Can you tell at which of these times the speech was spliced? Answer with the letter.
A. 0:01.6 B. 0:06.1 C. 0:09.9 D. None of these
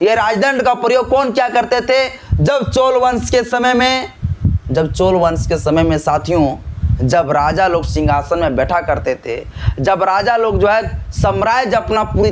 D